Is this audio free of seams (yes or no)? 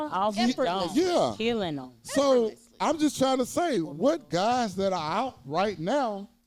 yes